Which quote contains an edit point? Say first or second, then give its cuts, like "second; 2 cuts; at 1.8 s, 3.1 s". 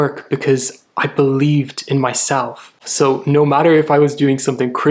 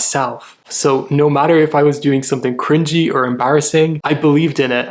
second; 1 cut; at 4.0 s